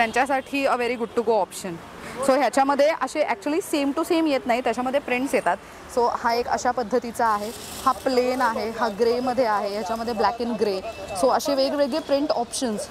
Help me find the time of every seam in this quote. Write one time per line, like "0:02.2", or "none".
none